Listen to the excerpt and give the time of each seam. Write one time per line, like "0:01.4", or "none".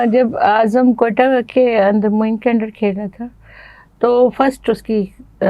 none